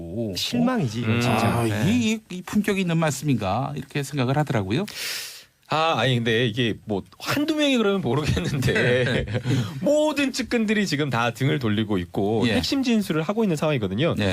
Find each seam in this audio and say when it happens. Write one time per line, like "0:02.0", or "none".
0:10.6